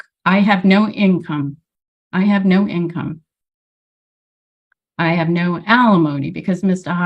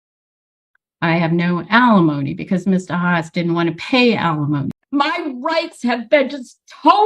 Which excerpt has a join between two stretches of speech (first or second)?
second